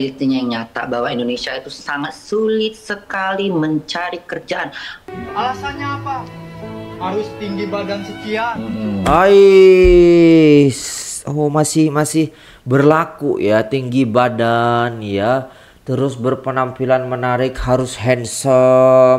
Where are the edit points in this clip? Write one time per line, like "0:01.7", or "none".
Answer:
0:05.1